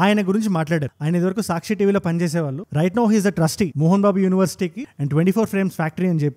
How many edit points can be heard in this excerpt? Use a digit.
0